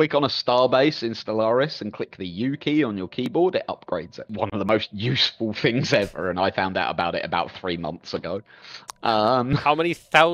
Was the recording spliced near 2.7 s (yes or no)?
no